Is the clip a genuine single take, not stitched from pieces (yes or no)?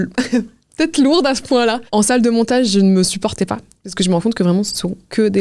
yes